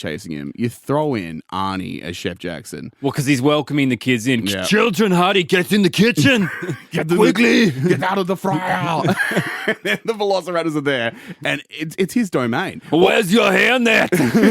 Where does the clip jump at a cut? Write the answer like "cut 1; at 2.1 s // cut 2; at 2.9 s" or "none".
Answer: none